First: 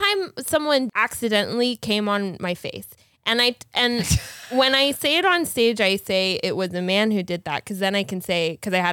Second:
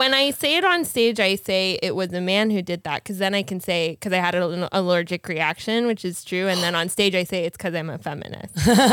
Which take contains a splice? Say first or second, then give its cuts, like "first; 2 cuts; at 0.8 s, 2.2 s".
first; 1 cut; at 0.9 s